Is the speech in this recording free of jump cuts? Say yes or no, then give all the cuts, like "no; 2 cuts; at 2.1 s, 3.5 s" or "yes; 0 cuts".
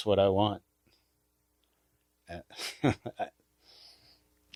yes; 0 cuts